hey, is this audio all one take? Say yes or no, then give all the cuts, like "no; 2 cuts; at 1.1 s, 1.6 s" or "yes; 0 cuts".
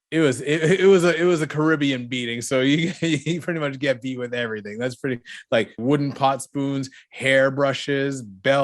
no; 1 cut; at 5.8 s